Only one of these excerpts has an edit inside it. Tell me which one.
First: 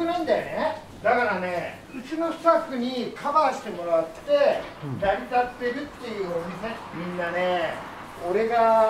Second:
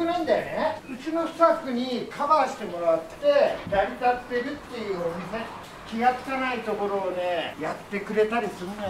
second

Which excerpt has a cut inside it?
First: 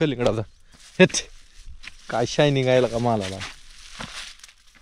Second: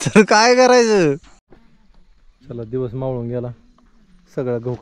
second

